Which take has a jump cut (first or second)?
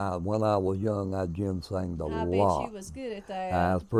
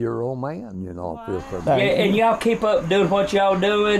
second